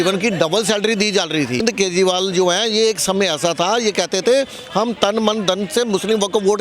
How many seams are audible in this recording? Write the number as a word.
one